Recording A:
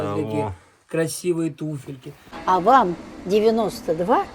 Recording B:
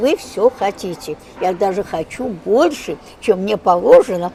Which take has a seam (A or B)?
A